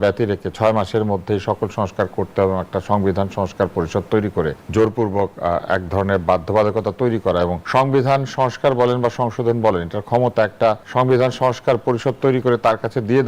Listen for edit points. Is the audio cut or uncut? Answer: cut